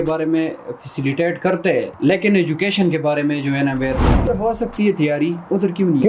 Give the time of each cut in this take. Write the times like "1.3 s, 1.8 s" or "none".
1.9 s, 4.3 s